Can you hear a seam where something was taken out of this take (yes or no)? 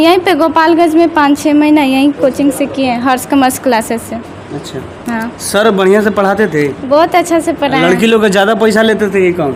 no